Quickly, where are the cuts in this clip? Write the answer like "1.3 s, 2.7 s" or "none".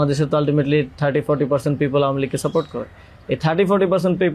none